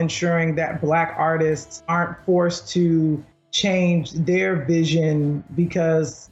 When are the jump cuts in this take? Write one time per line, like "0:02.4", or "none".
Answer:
0:01.7

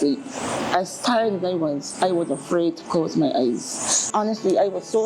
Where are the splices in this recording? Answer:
0:04.0

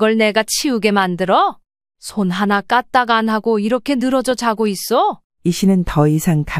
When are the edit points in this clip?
0:05.3

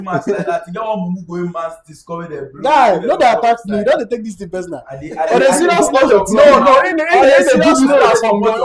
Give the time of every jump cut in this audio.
none

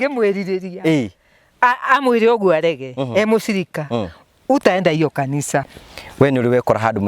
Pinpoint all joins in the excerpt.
0:05.7

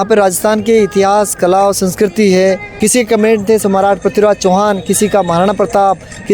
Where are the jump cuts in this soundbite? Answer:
0:02.7

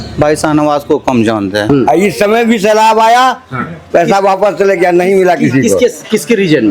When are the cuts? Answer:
0:01.7

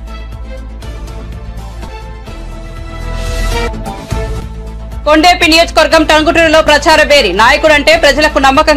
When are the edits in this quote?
0:01.0

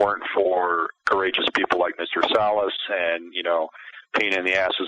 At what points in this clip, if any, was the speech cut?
0:00.9

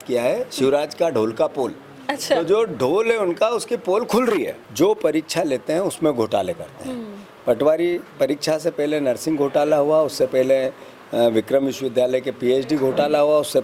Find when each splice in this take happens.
0:04.6

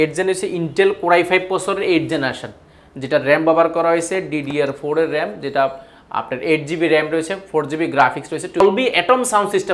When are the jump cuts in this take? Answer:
0:08.6

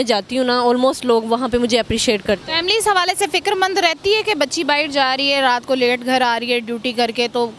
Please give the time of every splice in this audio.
none

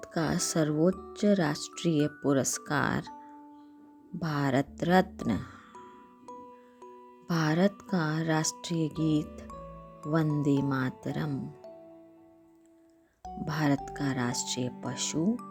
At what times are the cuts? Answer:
none

